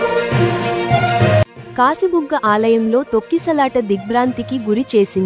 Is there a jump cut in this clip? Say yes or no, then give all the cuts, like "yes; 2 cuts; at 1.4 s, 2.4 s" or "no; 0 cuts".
no; 0 cuts